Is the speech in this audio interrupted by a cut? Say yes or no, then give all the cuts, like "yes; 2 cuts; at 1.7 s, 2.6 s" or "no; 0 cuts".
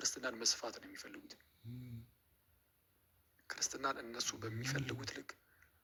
no; 0 cuts